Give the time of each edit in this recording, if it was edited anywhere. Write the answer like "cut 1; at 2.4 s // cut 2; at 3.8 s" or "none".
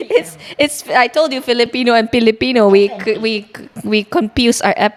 none